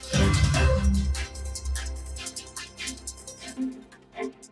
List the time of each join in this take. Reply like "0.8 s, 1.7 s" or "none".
1.0 s